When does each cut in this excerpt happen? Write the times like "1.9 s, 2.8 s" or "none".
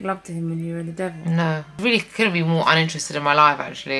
1.8 s